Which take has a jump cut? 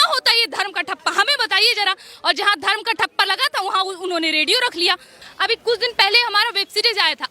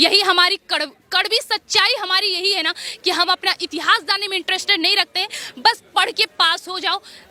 first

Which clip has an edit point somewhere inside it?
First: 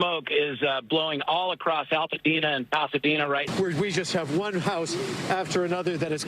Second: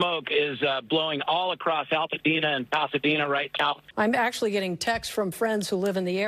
first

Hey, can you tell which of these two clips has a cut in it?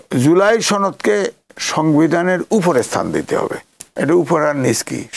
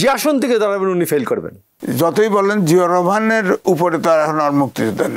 second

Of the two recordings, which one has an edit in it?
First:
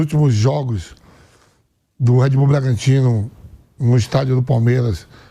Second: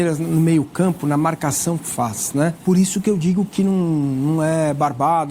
second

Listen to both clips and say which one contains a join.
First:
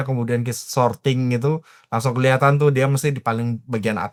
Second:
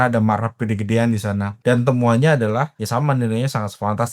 second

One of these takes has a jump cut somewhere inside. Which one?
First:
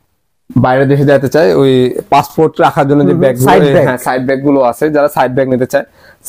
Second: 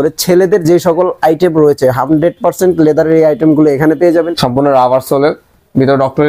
second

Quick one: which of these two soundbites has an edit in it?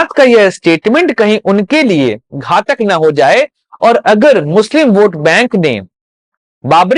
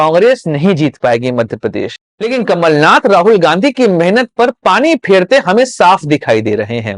second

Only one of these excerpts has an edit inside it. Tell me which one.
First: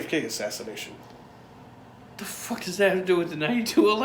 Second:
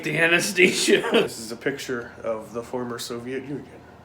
second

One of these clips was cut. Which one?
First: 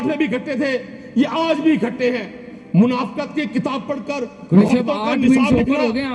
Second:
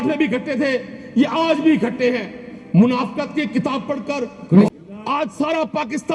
second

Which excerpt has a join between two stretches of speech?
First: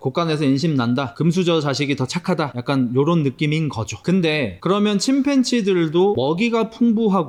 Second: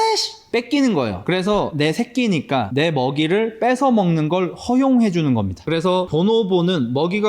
second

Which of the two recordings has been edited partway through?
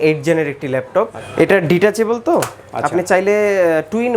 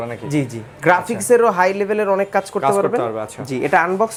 first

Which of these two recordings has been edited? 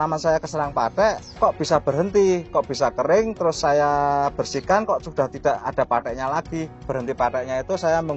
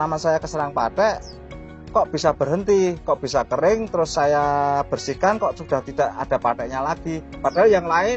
first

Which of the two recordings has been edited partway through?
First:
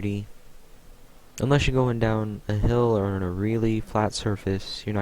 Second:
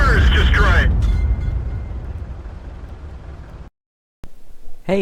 first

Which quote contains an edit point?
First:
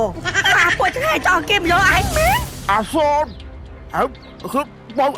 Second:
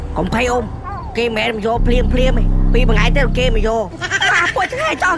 first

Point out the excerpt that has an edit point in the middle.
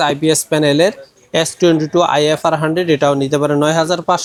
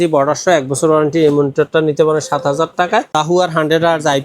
second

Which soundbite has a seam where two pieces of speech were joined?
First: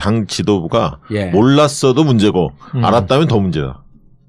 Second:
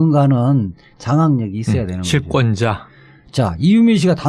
first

